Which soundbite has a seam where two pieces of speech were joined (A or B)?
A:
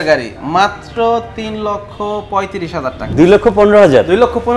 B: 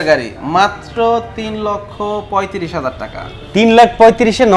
A